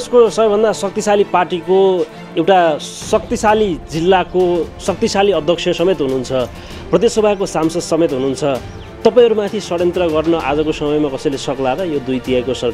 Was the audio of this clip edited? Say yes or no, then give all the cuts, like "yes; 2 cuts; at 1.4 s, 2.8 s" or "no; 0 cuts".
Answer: no; 0 cuts